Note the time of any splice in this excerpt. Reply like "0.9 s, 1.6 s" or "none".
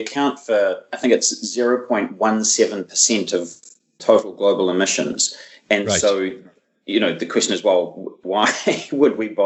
none

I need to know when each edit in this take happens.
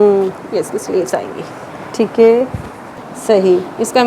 3.0 s

